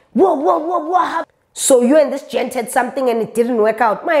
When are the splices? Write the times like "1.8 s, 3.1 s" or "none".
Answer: 1.2 s